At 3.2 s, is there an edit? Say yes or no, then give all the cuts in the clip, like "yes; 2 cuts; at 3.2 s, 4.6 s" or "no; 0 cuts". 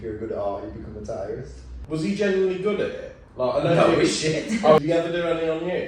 no; 2 cuts; at 1.7 s, 4.8 s